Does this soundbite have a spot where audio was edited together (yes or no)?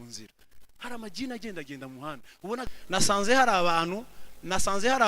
yes